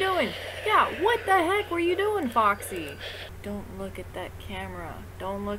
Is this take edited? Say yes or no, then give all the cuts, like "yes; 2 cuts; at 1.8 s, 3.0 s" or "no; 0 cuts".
yes; 1 cut; at 3.3 s